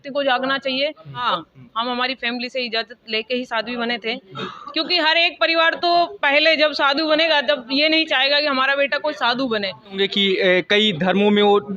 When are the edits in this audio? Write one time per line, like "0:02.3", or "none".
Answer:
0:01.3
0:10.0

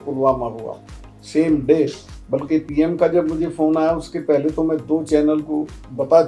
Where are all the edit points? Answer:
none

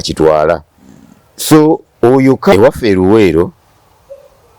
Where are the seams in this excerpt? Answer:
0:02.5

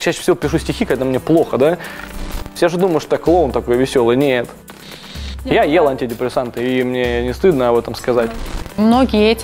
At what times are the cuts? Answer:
0:02.1
0:05.2
0:08.2

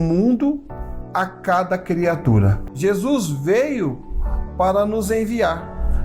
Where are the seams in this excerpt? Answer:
0:02.5

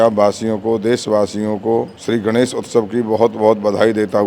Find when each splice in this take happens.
0:02.0

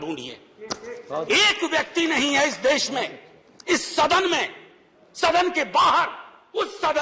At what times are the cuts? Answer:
none

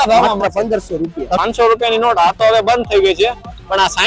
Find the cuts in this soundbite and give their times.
0:01.3

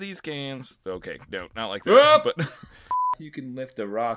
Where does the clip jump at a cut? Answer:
0:03.1

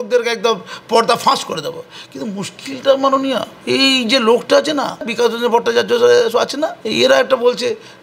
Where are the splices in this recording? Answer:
0:03.5
0:05.1
0:06.8

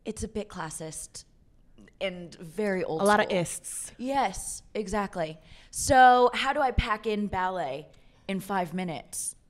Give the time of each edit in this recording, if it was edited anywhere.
none

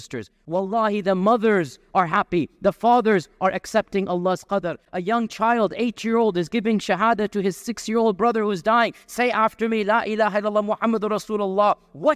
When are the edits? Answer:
none

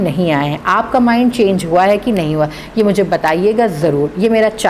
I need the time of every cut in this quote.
none

